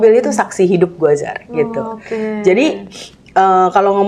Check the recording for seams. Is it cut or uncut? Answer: uncut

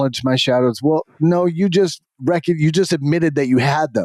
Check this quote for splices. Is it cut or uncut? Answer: uncut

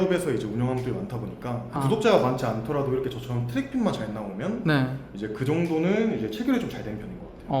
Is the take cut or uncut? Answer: cut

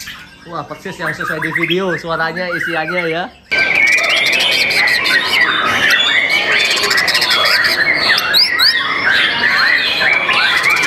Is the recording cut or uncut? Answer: cut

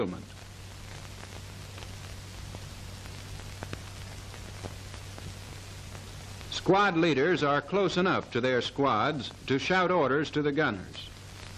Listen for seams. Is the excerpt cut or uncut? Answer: uncut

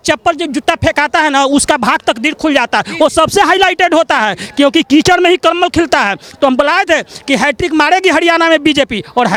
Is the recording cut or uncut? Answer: uncut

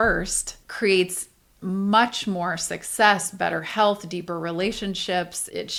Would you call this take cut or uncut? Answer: uncut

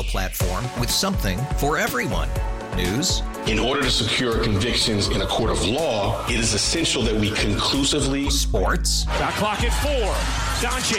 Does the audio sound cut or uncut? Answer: uncut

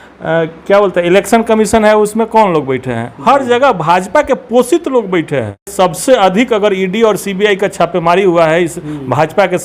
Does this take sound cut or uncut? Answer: cut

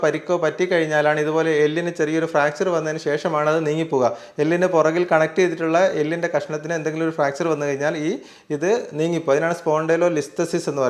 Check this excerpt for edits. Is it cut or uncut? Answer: uncut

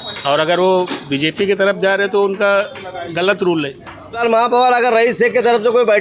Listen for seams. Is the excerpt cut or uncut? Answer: cut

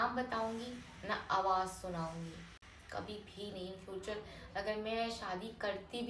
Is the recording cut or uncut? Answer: uncut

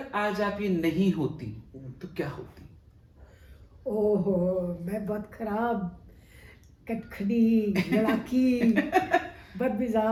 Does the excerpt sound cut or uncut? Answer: uncut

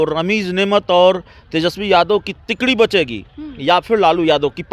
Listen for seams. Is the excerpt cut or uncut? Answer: uncut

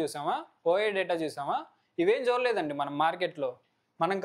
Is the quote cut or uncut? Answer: uncut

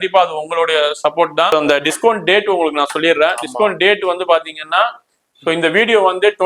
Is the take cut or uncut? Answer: cut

